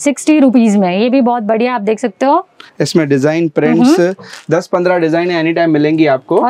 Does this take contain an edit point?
no; 0 cuts

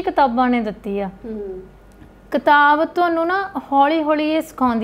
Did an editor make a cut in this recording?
no; 0 cuts

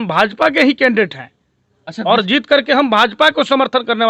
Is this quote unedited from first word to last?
yes; 0 cuts

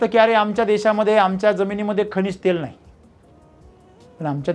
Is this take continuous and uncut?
yes; 0 cuts

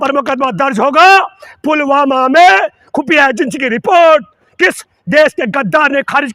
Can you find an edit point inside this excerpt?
no; 0 cuts

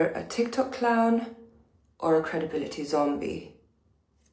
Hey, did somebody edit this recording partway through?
yes; 1 cut; at 2.8 s

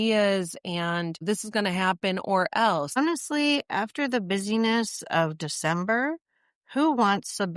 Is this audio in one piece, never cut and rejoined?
no; 2 cuts; at 1.2 s, 3.0 s

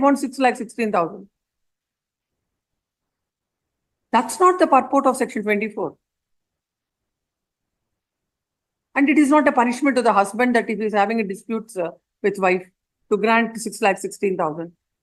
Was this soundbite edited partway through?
no; 0 cuts

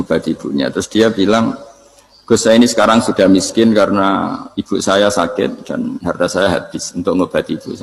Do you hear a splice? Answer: no; 0 cuts

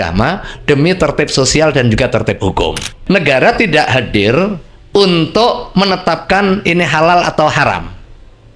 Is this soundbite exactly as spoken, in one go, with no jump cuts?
no; 1 cut; at 2.9 s

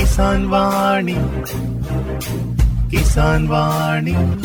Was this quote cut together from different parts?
no; 0 cuts

